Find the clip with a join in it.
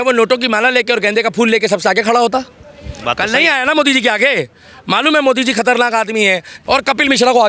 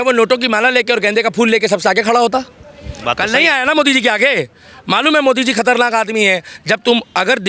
first; 1 cut; at 6.5 s

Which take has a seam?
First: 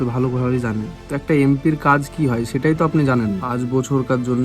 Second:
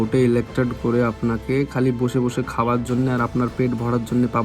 first; 2 cuts; at 1.0 s, 3.5 s

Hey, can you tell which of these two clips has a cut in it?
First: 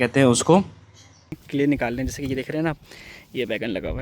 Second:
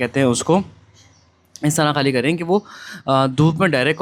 first; 1 cut; at 1.4 s

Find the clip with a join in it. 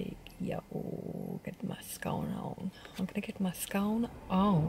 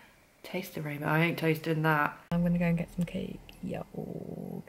second; 1 cut; at 2.3 s

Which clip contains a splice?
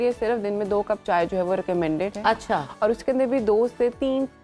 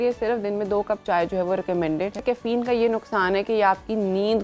second; 1 cut; at 2.2 s

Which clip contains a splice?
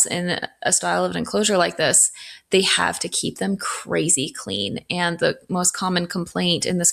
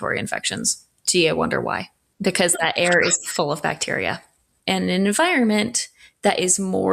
second; 2 cuts; at 2.1 s, 4.5 s

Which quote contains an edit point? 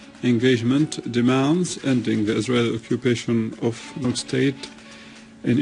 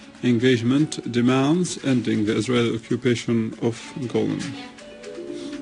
second; 1 cut; at 4.0 s

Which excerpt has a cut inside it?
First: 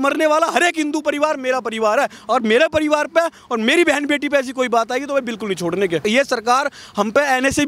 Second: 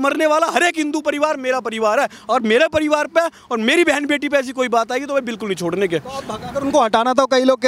first; 1 cut; at 6.0 s

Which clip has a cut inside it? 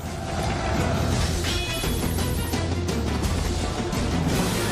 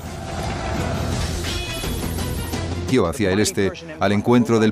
first; 1 cut; at 2.9 s

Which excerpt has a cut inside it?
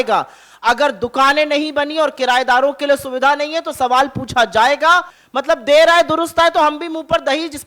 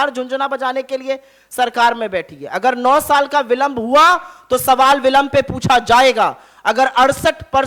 first; 1 cut; at 5.2 s

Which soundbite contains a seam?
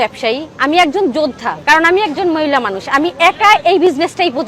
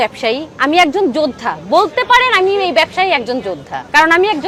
first; 1 cut; at 1.5 s

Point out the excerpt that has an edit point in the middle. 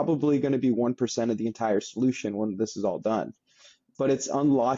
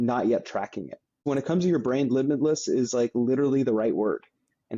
second; 1 cut; at 1.2 s

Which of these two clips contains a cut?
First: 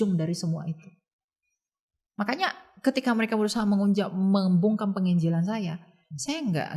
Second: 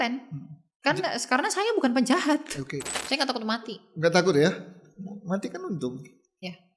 second; 1 cut; at 3.0 s

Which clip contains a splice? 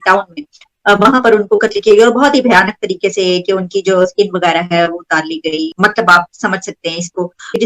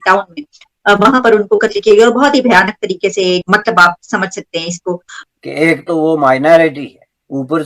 second; 2 cuts; at 3.4 s, 5.1 s

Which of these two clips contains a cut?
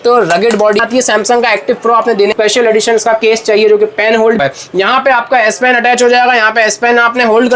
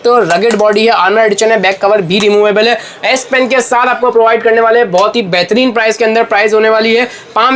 first; 3 cuts; at 0.8 s, 2.3 s, 4.4 s

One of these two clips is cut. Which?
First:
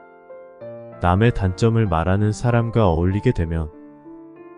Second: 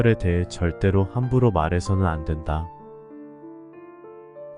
first; 1 cut; at 1.0 s

